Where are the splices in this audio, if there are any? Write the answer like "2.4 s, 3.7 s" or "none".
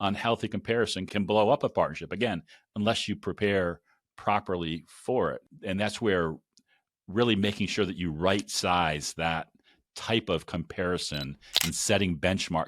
1.0 s, 5.4 s